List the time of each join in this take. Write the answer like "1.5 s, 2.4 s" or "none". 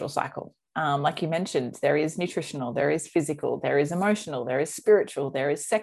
none